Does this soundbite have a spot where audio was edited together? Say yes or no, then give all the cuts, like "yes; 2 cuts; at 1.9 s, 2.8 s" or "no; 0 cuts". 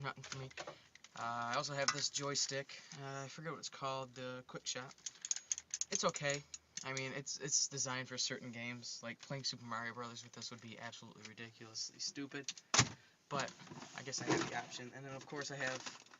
yes; 1 cut; at 10.2 s